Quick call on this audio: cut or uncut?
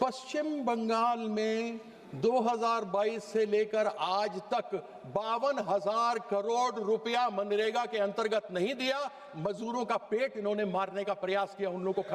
uncut